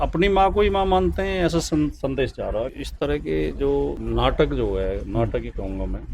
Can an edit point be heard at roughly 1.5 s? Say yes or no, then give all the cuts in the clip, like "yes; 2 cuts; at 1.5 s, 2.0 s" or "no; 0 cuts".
no; 2 cuts; at 2.8 s, 4.0 s